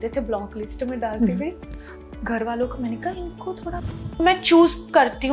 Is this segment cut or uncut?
cut